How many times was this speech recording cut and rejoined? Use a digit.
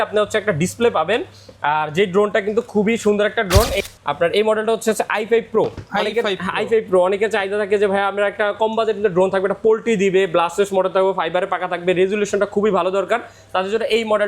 1